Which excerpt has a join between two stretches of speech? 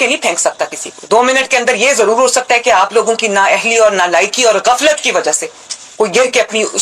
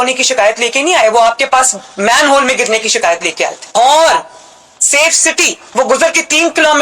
second; 1 cut; at 5.6 s

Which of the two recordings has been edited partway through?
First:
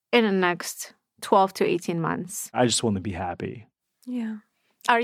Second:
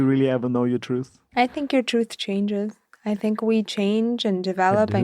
second; 1 cut; at 1.2 s

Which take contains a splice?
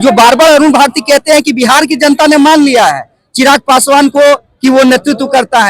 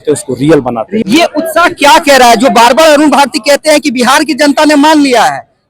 second; 1 cut; at 0.9 s

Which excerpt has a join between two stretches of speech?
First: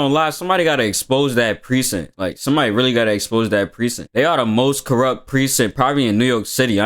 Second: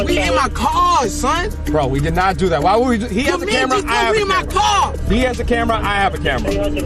first; 1 cut; at 4.0 s

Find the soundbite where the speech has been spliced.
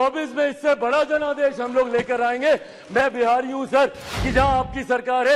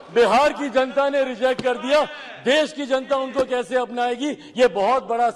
first; 1 cut; at 4.1 s

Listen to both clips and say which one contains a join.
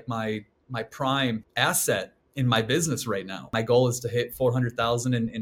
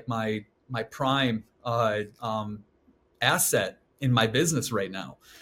first; 2 cuts; at 1.5 s, 3.5 s

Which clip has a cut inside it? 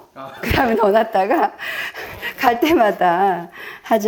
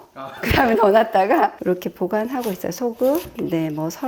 second; 1 cut; at 1.6 s

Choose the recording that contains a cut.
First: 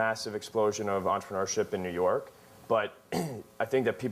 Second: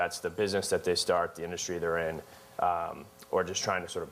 first; 1 cut; at 1.9 s

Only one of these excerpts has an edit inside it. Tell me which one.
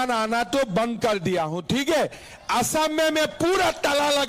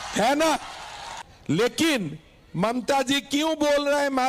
second; 1 cut; at 1.6 s

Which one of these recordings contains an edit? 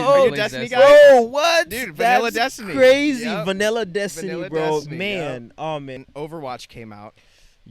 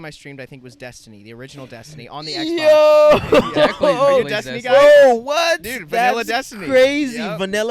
first; 1 cut; at 6.0 s

